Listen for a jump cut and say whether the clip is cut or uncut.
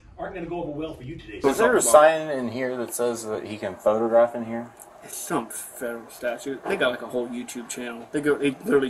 cut